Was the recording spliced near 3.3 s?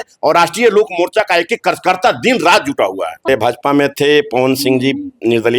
yes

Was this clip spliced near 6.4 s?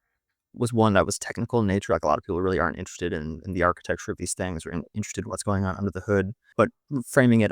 yes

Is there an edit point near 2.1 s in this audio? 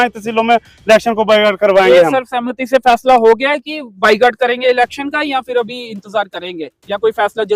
no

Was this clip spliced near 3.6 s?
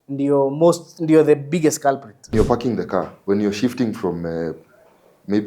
no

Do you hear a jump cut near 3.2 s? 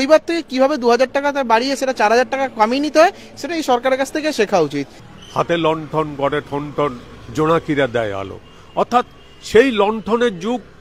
no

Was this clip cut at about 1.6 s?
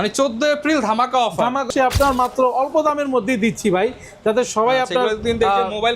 yes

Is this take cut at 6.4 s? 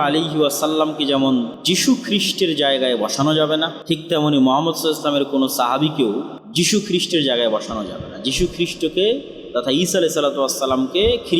yes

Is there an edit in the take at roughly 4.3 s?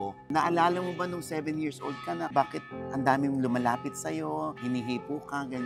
no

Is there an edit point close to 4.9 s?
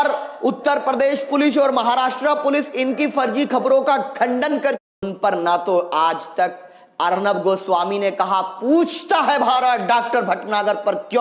yes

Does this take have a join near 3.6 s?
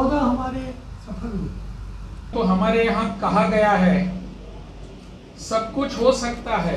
no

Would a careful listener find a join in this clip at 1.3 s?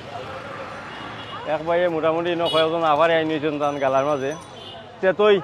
no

